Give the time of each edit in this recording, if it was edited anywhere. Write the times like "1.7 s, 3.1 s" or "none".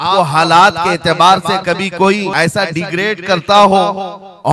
2.3 s